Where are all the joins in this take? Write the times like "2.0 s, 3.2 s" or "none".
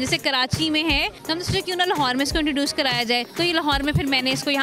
1.2 s, 3.3 s